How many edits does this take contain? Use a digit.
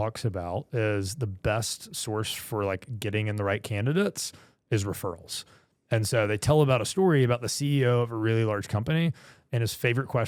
0